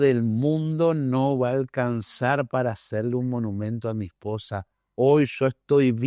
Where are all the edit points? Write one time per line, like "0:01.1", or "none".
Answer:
none